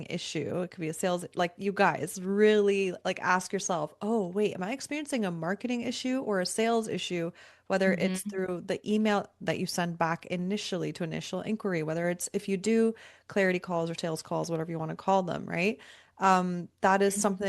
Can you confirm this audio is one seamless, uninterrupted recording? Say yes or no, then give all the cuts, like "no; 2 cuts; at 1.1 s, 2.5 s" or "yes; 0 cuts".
yes; 0 cuts